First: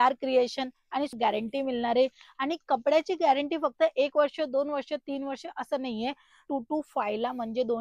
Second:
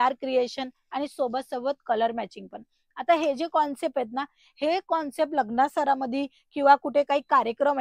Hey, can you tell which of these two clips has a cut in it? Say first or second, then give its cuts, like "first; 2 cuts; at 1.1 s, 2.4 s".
first; 2 cuts; at 1.1 s, 6.5 s